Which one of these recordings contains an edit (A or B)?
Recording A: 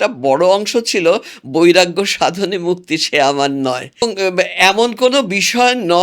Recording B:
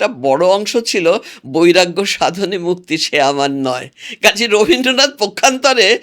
A